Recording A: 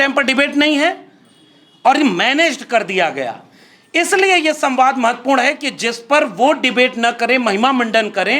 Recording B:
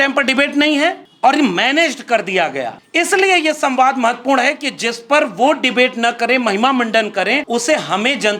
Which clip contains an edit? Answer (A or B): B